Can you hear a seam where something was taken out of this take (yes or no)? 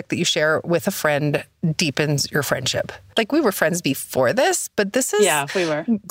yes